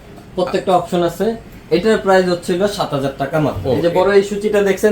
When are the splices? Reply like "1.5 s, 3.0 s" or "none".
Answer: 3.6 s